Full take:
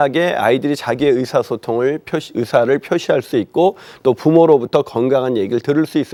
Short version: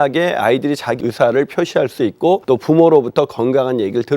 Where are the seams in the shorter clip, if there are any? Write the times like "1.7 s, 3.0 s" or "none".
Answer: 1.0 s, 2.4 s